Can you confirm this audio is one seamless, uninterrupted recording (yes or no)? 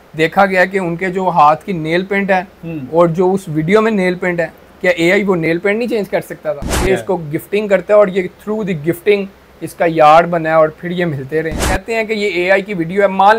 no